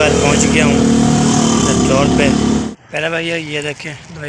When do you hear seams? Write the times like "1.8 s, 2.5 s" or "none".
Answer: 2.7 s